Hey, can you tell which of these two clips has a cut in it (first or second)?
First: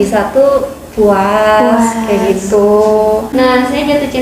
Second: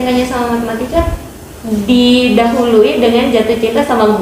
first